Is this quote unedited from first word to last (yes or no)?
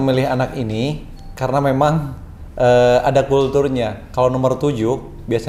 yes